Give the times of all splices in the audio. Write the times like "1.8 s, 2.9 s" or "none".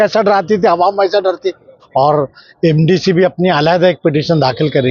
1.7 s